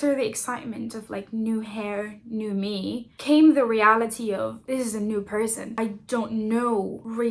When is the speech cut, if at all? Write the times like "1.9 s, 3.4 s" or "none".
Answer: none